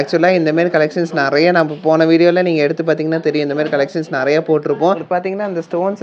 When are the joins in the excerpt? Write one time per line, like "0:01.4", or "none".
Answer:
0:05.0